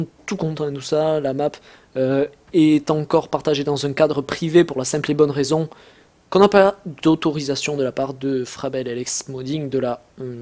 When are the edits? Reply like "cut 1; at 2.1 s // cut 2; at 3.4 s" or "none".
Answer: cut 1; at 1.7 s

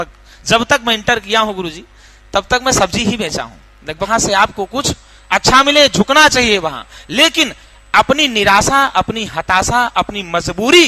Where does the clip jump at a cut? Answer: cut 1; at 4.1 s

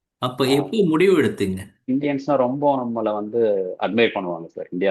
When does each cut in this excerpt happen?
cut 1; at 1.9 s

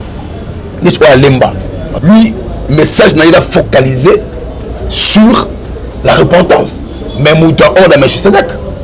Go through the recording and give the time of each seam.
cut 1; at 1.8 s

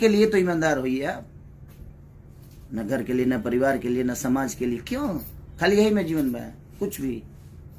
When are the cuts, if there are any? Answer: none

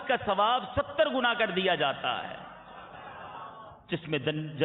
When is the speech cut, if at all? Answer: none

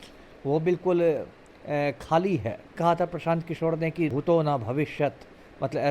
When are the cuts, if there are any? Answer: cut 1; at 2.8 s // cut 2; at 4.1 s

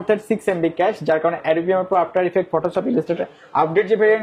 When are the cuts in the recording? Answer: none

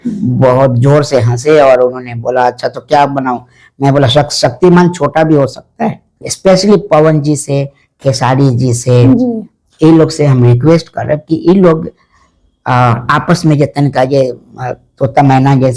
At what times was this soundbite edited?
cut 1; at 6.3 s

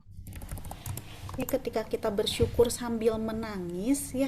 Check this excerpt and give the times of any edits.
cut 1; at 1.4 s

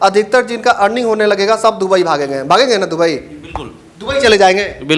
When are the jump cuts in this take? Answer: none

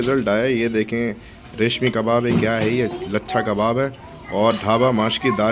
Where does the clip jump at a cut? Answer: none

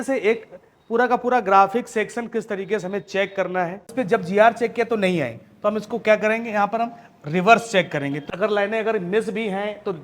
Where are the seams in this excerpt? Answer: cut 1; at 3.9 s // cut 2; at 8.2 s

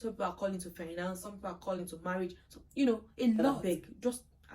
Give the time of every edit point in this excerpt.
cut 1; at 3.6 s

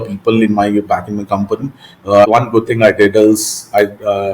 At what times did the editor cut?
cut 1; at 2.2 s

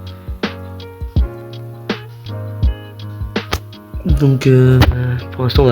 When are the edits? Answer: cut 1; at 1.2 s // cut 2; at 3.7 s

